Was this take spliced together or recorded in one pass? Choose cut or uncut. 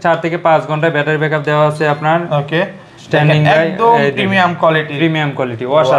uncut